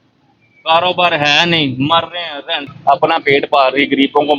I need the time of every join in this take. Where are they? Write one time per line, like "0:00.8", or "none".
0:02.7